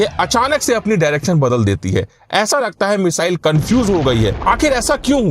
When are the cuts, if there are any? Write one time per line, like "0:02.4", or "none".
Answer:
0:04.4